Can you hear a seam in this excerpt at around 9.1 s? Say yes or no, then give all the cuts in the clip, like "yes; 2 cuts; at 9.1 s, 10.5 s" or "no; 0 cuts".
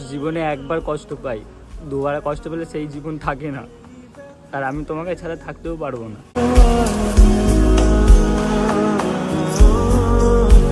no; 0 cuts